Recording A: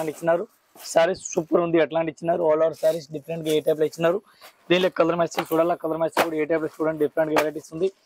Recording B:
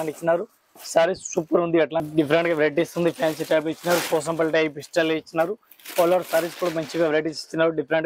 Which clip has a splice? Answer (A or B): B